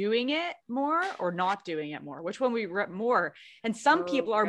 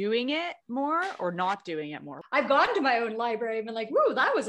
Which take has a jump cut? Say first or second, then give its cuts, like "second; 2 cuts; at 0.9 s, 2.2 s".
second; 1 cut; at 2.1 s